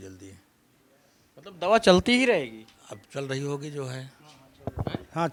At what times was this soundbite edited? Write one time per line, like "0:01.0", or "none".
none